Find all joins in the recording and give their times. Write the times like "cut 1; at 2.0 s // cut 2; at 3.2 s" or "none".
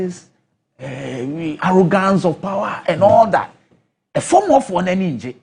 none